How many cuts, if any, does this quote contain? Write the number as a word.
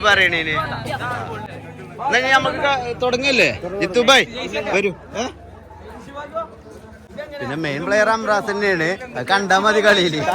zero